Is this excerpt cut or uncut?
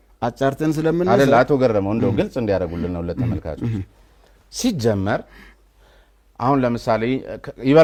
uncut